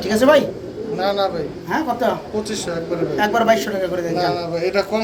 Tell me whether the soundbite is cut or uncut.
uncut